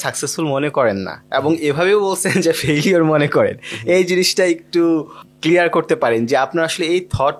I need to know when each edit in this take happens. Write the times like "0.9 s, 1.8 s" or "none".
none